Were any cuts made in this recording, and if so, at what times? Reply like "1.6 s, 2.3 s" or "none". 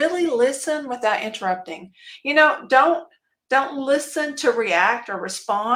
none